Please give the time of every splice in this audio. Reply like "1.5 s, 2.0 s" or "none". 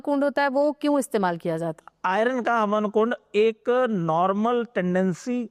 none